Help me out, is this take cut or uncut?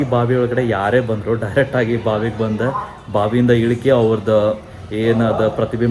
uncut